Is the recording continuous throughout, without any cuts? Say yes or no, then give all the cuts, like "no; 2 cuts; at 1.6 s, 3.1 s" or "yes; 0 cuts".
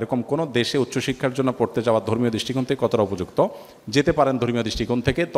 yes; 0 cuts